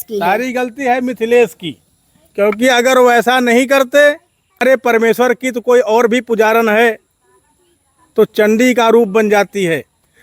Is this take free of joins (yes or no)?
no